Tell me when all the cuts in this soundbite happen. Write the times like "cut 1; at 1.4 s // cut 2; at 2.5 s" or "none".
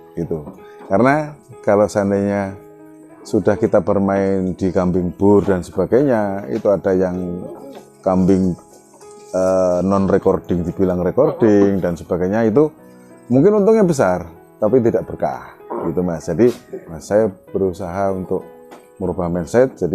cut 1; at 17.0 s